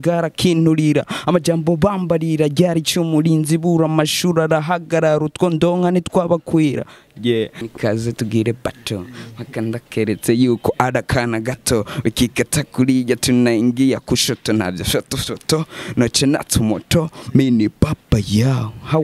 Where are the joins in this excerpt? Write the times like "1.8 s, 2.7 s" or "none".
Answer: 7.6 s